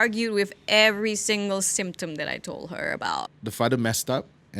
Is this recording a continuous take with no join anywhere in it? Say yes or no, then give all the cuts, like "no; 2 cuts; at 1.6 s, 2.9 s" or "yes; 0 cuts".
no; 1 cut; at 3.4 s